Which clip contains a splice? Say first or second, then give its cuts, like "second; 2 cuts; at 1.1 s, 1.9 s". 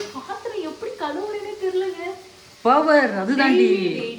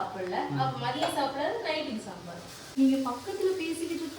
second; 1 cut; at 2.7 s